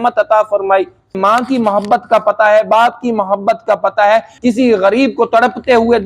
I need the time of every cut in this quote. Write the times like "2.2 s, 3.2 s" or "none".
1.2 s, 4.3 s